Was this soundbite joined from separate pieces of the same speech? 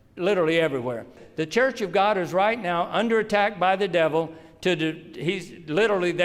yes; 1 cut; at 1.2 s

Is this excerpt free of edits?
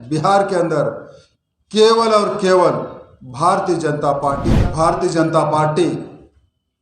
no; 1 cut; at 4.5 s

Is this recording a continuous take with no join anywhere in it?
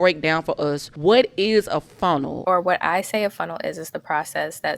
no; 2 cuts; at 0.9 s, 2.3 s

